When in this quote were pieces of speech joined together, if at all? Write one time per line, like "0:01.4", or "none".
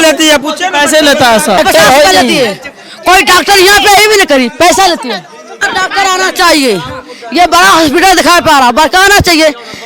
0:01.6
0:05.6